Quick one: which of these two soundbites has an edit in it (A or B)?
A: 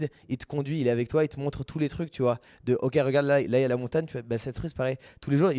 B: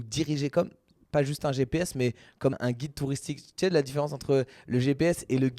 B